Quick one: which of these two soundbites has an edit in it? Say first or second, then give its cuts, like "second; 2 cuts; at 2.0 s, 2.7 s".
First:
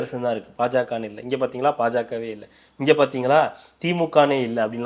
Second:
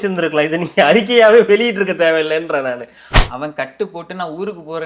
second; 1 cut; at 3.0 s